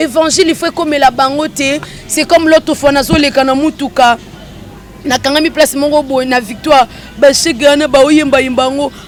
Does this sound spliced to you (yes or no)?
no